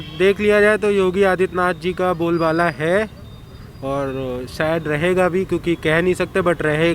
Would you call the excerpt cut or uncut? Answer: uncut